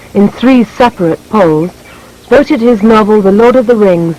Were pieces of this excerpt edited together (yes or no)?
no